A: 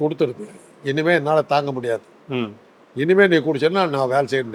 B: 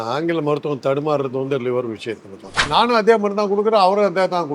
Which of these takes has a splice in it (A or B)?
B